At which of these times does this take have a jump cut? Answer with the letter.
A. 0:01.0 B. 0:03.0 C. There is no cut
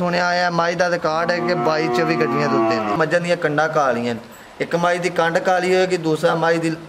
B